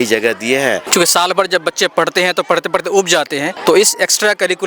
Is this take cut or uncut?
cut